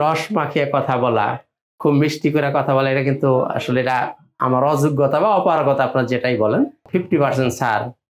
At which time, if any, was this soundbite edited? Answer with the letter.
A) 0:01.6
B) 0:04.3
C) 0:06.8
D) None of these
C